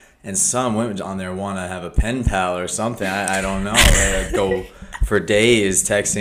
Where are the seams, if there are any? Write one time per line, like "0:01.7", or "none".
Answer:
none